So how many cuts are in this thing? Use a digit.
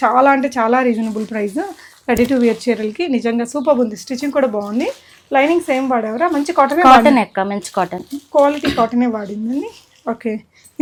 0